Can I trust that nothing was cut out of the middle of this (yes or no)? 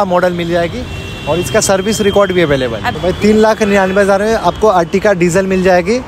no